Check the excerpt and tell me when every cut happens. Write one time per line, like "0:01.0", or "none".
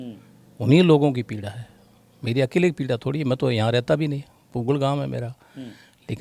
none